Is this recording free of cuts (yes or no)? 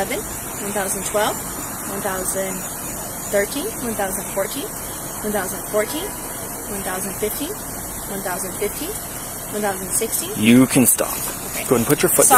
yes